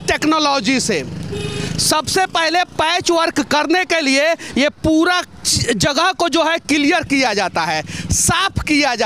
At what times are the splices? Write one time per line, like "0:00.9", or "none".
none